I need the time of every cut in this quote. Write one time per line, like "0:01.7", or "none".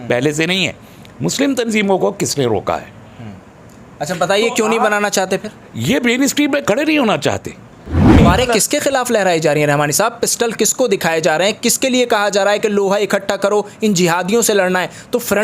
0:08.2